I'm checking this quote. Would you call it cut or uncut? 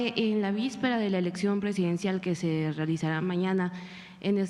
uncut